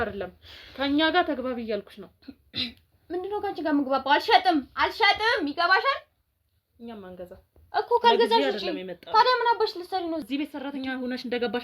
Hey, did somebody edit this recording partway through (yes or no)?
yes